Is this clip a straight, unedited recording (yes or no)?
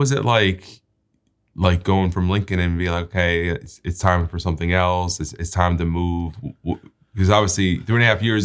yes